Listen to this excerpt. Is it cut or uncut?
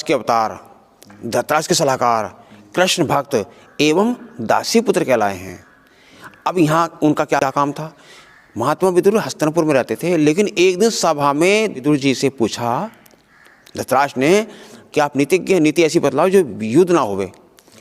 cut